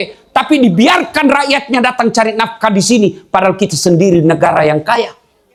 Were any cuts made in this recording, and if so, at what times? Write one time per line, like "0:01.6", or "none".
none

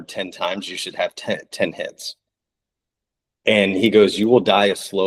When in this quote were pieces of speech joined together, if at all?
none

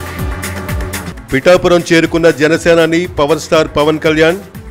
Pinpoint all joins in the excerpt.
0:01.1

